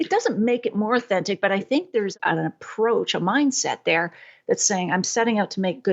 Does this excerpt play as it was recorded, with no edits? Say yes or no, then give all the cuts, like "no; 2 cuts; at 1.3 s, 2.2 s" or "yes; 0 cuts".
no; 1 cut; at 2.1 s